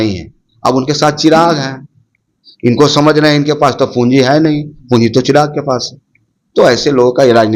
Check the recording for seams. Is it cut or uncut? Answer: uncut